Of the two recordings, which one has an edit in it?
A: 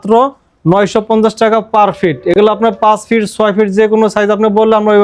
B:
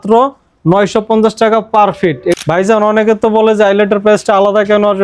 B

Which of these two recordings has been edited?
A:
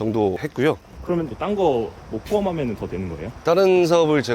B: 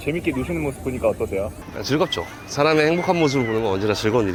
A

